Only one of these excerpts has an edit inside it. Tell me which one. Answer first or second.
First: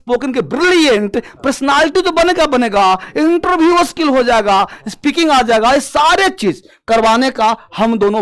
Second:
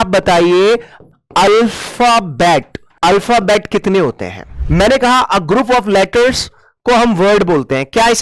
second